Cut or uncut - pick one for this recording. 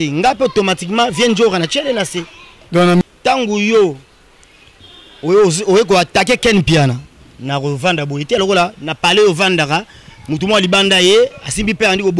cut